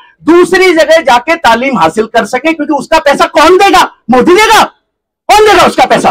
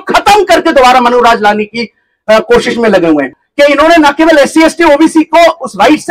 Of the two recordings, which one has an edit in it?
second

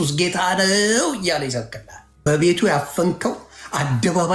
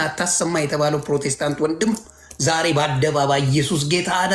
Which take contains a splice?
first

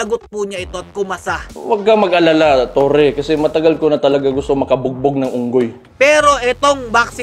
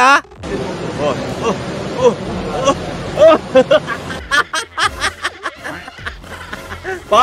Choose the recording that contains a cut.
first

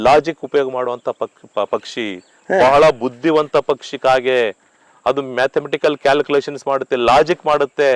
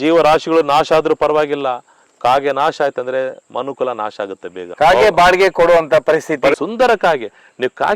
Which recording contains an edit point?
second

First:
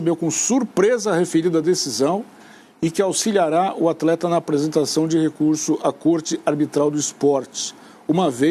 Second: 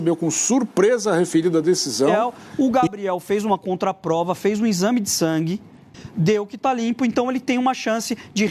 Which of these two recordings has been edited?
second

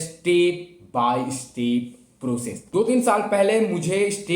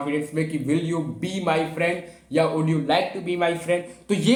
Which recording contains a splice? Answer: first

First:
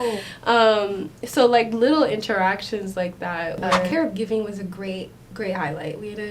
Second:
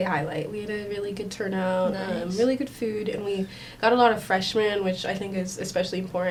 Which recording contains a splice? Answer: first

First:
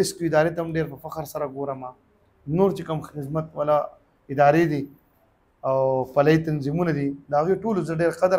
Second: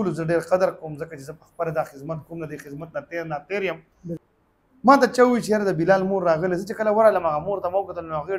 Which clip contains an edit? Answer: second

